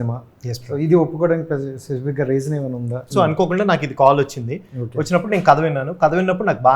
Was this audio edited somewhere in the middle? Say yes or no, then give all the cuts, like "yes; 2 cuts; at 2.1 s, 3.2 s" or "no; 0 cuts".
yes; 1 cut; at 3.1 s